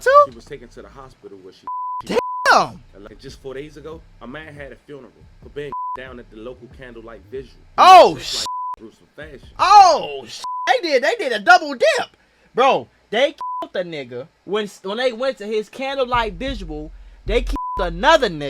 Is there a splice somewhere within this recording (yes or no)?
yes